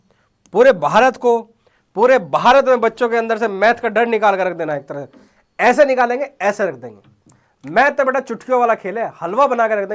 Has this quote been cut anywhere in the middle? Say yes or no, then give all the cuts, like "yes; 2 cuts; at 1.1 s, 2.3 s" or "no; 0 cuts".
no; 0 cuts